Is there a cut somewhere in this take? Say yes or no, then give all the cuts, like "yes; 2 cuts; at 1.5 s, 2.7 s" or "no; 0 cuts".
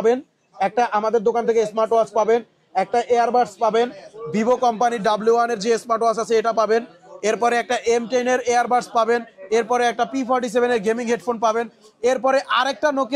no; 0 cuts